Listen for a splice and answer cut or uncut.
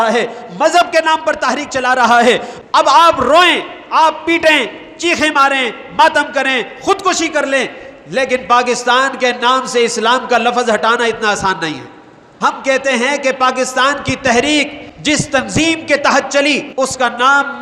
cut